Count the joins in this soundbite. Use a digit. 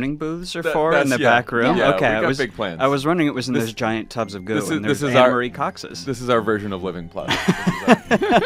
0